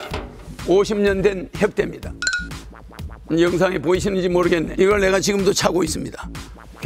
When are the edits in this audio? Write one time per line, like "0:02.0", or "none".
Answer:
0:04.7